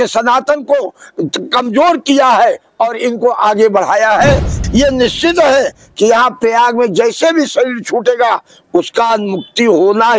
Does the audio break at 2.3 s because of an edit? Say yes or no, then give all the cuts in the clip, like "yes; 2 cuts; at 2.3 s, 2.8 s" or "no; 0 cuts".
no; 1 cut; at 4.5 s